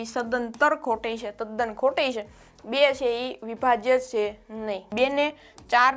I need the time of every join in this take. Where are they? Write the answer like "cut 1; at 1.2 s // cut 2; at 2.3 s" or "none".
cut 1; at 4.9 s